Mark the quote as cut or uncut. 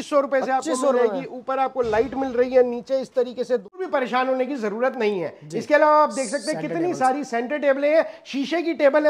cut